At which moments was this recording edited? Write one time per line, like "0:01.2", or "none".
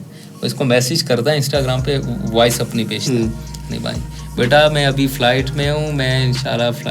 none